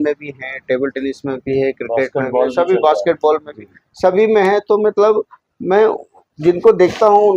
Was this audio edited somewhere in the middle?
no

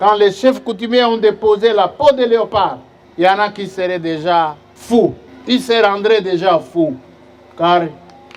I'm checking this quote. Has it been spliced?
no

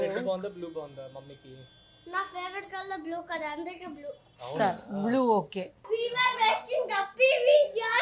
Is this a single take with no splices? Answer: no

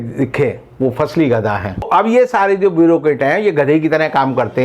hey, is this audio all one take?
no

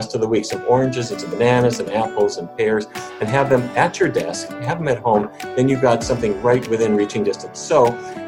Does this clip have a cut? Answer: no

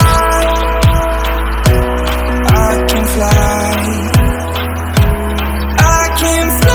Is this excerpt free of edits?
yes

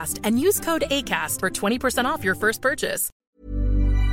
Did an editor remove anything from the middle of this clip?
yes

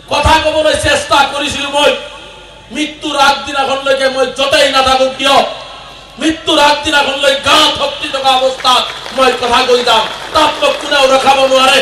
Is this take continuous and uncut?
yes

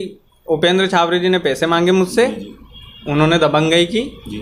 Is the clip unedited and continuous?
yes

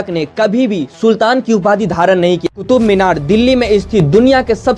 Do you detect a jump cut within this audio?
yes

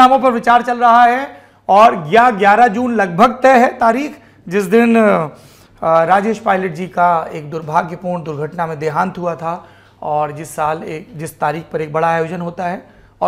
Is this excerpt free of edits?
yes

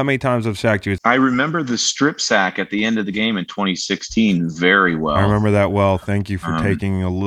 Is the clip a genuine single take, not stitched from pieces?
no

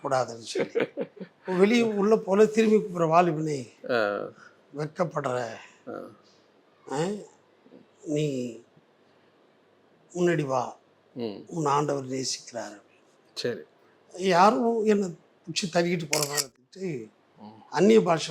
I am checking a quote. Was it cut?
yes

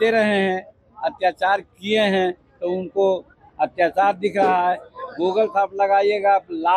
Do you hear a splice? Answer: no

